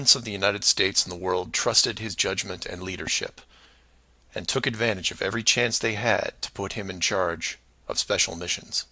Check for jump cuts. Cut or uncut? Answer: cut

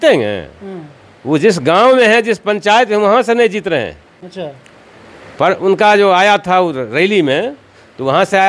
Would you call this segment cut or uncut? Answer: uncut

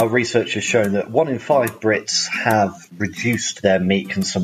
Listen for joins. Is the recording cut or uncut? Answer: cut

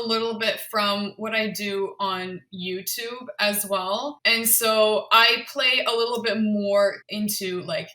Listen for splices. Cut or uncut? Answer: cut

